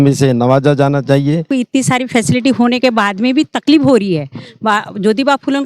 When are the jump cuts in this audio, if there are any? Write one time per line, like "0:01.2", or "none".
0:01.5

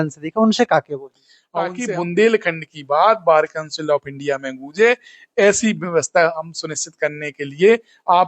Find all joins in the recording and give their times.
0:01.8

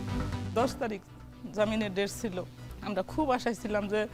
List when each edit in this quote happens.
none

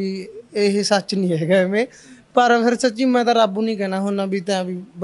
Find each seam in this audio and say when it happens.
none

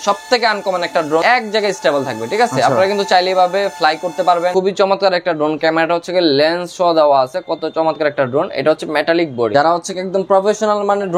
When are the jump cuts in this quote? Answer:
0:01.2
0:04.5
0:09.5

